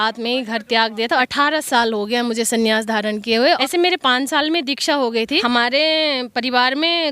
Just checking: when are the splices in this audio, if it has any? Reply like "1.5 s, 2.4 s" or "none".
1.3 s, 3.6 s, 5.4 s

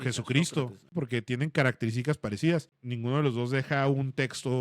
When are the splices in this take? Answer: 0.9 s, 2.8 s

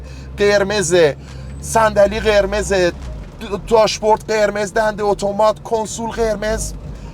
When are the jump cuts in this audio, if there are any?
none

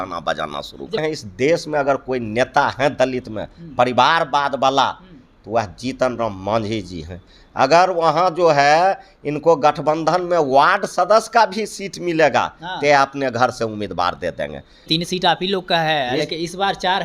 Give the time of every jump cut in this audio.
1.0 s, 14.9 s

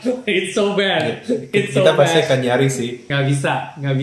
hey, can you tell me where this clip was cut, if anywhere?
3.0 s

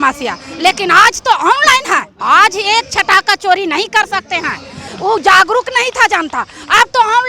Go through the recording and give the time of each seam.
4.9 s

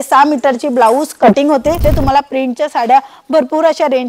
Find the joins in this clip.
1.8 s

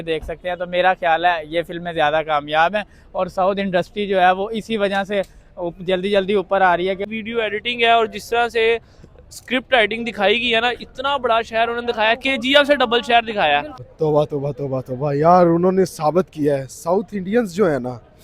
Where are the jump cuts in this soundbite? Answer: 7.0 s, 13.8 s

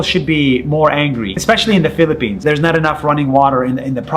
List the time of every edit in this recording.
1.3 s, 2.4 s

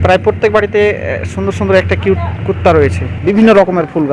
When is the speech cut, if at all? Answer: 3.1 s

